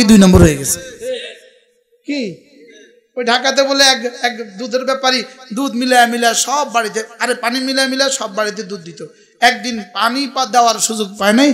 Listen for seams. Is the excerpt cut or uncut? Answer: uncut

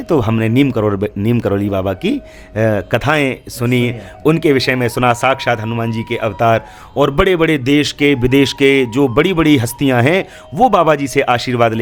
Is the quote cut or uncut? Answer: uncut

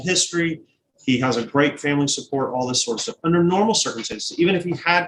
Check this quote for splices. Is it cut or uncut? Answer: uncut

